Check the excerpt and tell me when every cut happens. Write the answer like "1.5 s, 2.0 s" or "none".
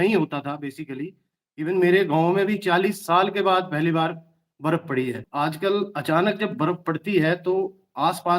5.2 s